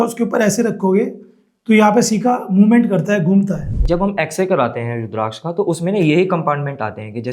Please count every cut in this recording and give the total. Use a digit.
1